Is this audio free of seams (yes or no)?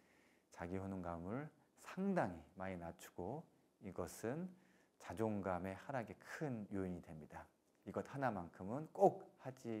yes